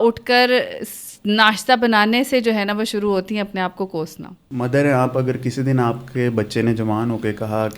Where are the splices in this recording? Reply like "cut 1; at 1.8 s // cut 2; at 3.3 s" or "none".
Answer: cut 1; at 4.5 s